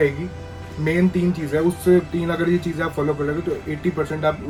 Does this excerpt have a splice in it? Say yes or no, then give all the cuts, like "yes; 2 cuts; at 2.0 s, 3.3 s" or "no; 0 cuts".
no; 0 cuts